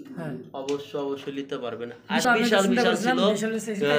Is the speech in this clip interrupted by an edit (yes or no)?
yes